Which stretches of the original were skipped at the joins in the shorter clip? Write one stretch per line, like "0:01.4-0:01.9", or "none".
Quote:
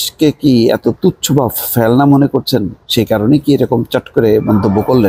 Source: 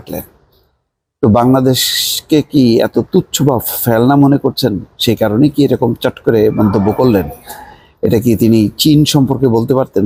none

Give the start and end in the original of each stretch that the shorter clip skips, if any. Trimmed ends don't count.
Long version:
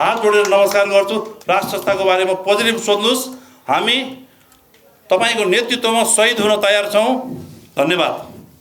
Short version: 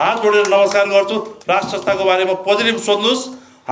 none

